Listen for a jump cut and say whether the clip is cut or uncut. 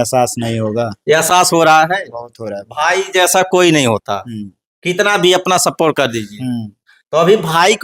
uncut